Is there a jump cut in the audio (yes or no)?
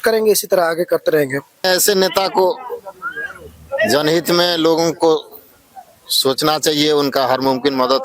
yes